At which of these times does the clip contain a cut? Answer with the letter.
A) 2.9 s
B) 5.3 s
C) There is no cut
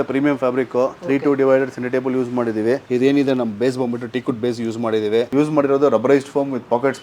B